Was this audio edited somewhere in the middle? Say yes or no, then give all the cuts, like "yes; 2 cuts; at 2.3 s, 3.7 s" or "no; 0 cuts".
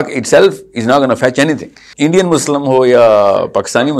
yes; 1 cut; at 1.9 s